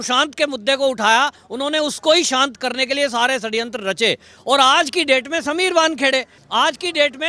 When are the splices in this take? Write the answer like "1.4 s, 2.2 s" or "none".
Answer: 6.4 s